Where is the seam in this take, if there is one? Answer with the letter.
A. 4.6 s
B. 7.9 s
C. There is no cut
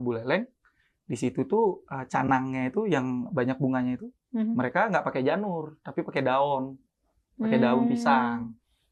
C